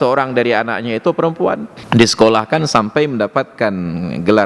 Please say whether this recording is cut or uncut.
cut